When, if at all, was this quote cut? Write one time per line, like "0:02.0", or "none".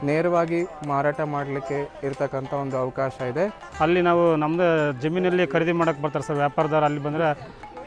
0:03.6